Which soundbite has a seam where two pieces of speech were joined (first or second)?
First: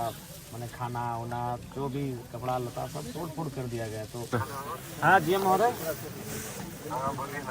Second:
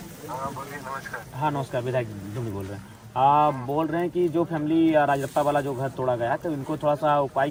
first